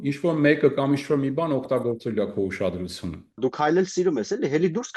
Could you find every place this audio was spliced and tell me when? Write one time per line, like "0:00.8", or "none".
0:03.4